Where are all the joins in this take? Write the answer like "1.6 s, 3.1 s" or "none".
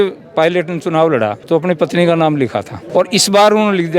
1.4 s, 2.8 s